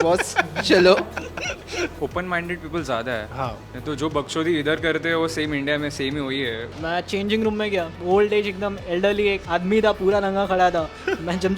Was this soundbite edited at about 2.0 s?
yes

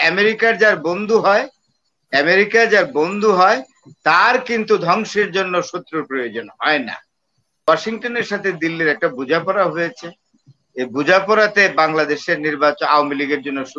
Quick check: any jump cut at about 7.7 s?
yes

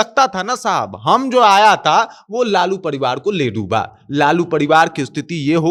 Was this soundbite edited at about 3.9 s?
no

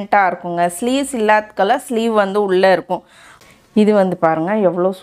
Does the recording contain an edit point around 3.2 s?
yes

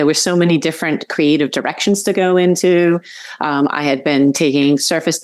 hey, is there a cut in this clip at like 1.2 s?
no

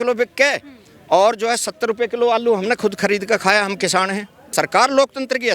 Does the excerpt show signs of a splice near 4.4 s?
yes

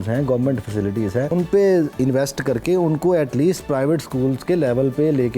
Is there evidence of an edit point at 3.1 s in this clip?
no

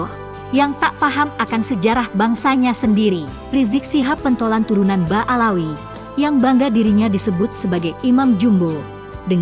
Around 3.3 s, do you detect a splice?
yes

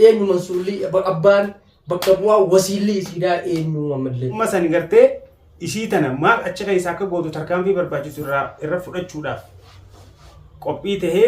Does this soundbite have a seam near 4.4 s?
yes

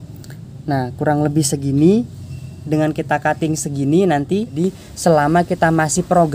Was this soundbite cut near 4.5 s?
yes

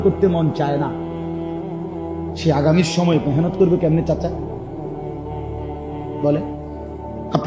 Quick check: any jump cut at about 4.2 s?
no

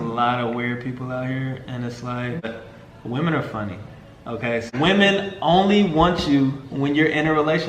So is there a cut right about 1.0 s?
no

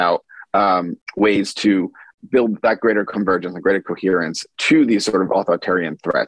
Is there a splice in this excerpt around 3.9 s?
no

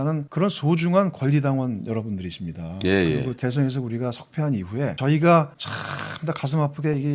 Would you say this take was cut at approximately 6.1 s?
no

